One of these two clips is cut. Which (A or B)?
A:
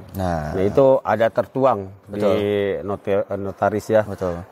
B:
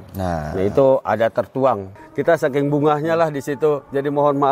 B